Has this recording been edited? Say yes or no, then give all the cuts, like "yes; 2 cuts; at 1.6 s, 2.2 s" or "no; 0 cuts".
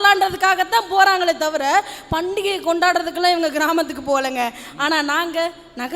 no; 0 cuts